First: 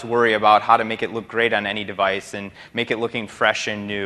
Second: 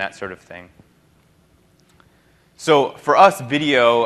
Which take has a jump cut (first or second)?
first